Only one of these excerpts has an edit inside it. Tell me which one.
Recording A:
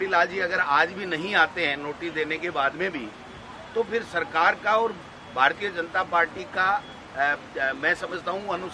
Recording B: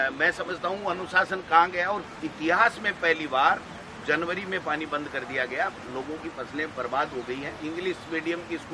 B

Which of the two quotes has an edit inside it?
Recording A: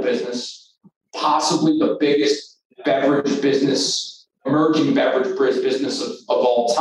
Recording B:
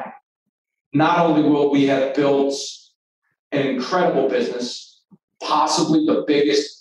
A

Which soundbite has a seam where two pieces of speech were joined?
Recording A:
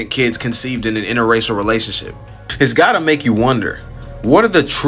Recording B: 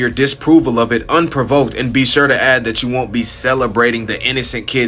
A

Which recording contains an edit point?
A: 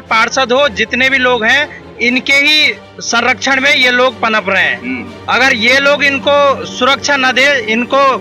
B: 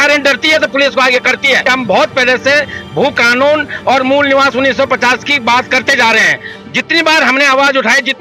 B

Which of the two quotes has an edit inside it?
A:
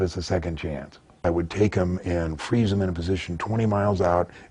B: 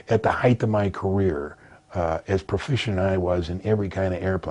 A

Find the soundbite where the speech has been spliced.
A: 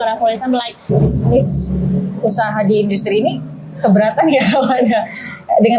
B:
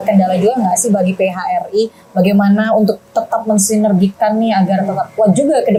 A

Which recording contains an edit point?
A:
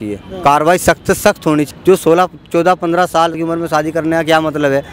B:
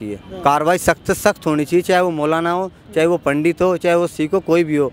A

